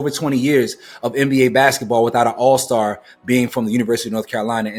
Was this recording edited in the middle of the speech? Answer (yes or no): no